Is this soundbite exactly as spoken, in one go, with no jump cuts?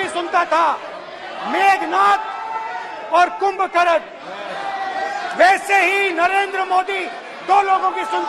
yes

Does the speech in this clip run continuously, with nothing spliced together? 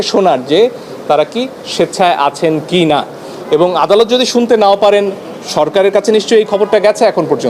yes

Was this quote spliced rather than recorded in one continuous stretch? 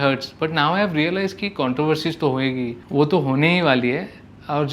no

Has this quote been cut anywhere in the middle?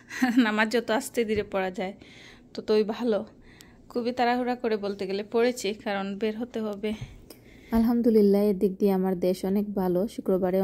no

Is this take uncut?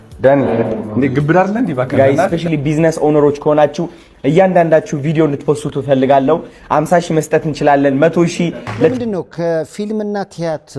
no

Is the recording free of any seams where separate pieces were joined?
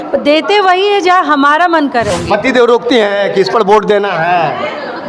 no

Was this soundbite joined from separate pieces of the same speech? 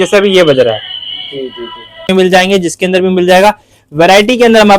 yes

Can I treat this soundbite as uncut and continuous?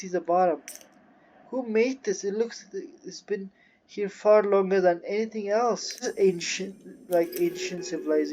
no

